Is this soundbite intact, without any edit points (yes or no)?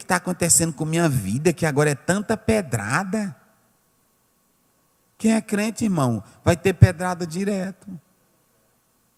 yes